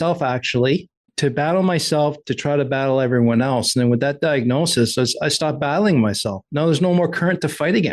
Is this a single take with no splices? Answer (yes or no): no